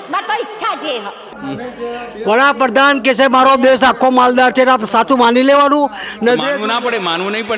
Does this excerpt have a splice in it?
yes; 1 cut; at 1.3 s

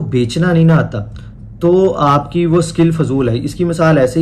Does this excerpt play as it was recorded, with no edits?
yes; 0 cuts

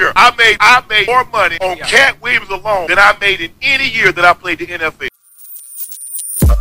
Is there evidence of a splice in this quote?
yes; 1 cut; at 5.0 s

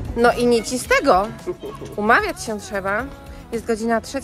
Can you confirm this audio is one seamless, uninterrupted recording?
yes; 0 cuts

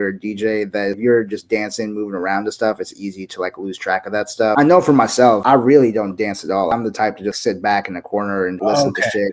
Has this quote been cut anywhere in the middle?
yes; 5 cuts; at 1.0 s, 4.5 s, 5.4 s, 6.8 s, 8.6 s

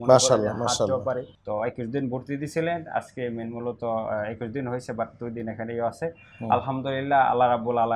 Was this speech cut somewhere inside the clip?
yes; 1 cut; at 1.3 s

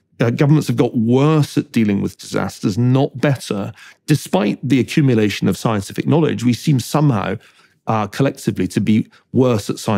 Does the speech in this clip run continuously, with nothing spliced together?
yes; 0 cuts

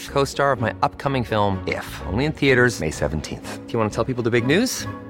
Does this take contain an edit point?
no; 0 cuts

